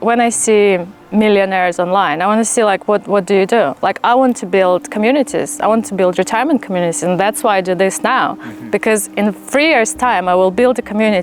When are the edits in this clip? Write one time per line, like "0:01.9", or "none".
none